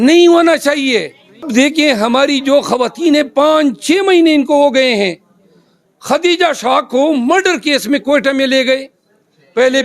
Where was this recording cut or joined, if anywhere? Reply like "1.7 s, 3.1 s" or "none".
1.5 s